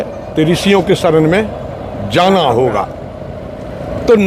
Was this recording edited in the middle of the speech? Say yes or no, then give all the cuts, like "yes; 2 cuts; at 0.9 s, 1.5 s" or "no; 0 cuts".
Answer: no; 0 cuts